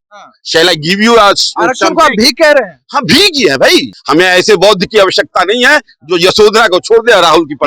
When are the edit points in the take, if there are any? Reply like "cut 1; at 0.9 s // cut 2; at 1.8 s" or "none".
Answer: cut 1; at 3.9 s